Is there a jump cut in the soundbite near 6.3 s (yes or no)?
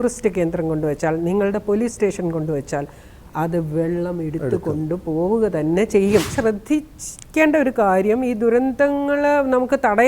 yes